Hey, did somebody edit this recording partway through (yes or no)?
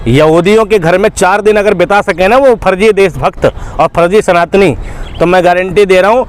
no